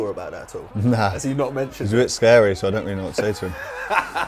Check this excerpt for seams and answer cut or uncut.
uncut